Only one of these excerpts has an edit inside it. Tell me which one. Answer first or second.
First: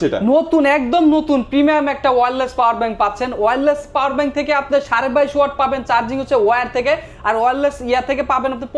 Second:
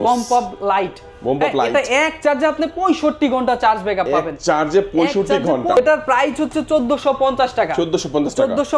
second